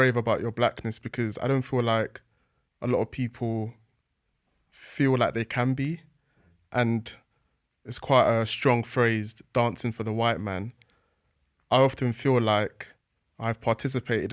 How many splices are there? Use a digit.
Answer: 0